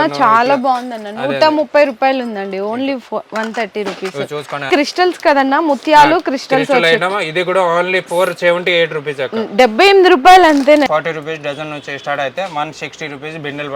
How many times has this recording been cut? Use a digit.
2